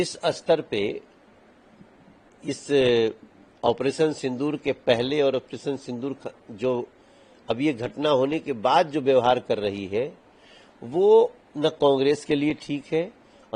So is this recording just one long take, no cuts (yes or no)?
yes